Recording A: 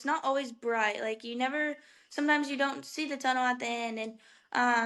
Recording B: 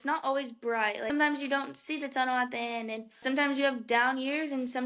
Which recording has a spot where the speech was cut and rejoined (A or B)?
B